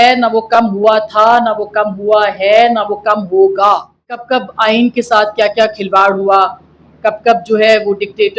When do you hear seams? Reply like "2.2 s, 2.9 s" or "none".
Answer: 4.2 s